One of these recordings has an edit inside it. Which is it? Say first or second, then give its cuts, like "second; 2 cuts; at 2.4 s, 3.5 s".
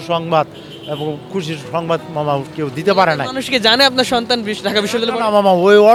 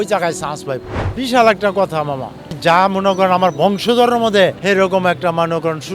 second; 3 cuts; at 1.0 s, 2.5 s, 4.6 s